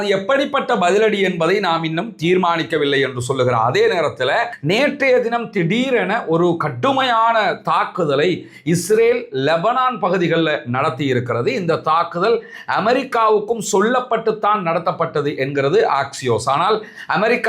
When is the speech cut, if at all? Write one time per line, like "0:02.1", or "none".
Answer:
0:04.5